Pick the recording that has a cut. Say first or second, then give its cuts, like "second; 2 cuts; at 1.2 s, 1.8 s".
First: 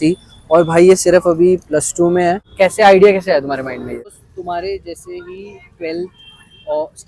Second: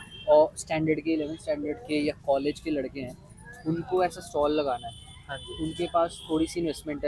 first; 2 cuts; at 2.5 s, 4.2 s